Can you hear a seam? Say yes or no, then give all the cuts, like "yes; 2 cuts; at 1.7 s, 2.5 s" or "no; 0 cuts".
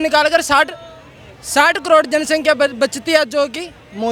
no; 0 cuts